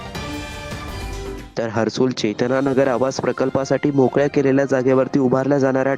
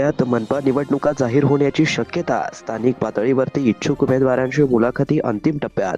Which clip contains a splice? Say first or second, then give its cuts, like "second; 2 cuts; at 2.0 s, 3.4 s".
first; 1 cut; at 1.3 s